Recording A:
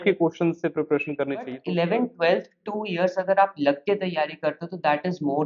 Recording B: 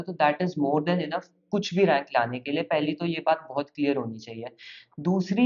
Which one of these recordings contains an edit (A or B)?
A